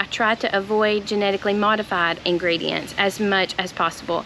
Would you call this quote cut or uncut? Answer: cut